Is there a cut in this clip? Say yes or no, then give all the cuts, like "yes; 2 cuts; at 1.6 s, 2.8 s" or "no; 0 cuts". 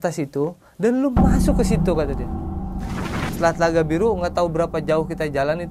yes; 1 cut; at 3.2 s